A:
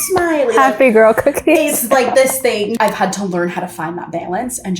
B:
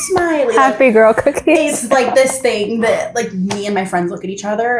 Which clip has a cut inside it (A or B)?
A